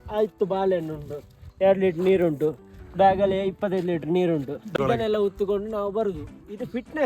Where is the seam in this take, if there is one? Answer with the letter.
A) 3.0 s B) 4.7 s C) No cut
B